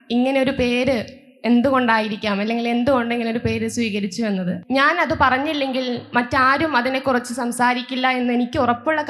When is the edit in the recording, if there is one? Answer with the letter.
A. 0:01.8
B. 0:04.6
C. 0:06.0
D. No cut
B